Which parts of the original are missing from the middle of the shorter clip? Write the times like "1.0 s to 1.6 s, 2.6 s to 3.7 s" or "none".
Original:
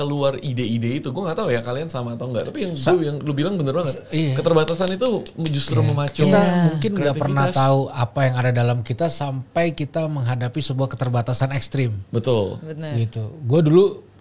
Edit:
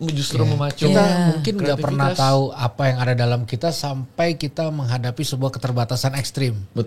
none